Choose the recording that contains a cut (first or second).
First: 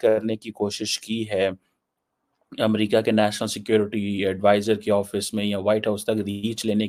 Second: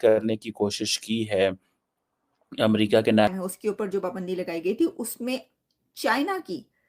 second